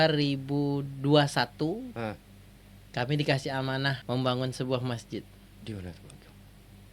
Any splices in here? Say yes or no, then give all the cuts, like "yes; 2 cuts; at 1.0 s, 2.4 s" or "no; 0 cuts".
yes; 1 cut; at 4.0 s